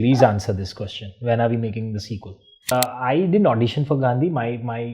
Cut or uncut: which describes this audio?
cut